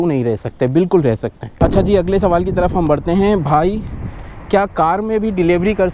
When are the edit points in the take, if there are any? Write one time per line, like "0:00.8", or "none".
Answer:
none